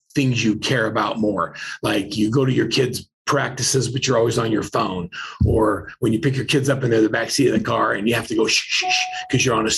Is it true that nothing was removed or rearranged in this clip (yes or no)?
yes